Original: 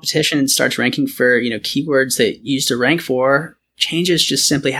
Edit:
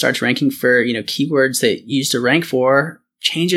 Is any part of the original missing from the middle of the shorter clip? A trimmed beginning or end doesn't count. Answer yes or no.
no